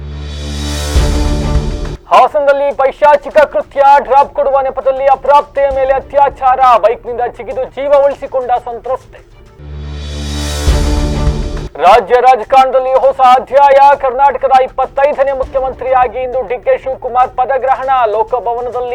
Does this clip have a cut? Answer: no; 0 cuts

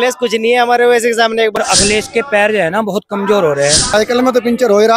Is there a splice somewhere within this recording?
yes; 2 cuts; at 1.6 s, 3.9 s

